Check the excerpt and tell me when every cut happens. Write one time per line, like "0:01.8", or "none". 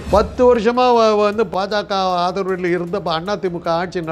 0:01.5